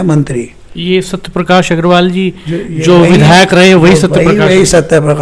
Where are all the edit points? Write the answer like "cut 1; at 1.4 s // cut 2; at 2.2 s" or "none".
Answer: none